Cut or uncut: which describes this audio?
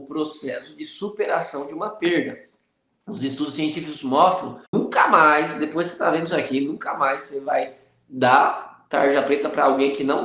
cut